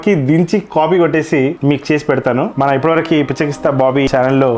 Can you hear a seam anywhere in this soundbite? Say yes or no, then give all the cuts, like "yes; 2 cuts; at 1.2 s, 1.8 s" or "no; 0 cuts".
yes; 1 cut; at 2.5 s